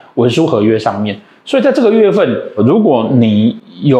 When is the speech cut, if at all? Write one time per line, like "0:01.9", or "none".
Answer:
none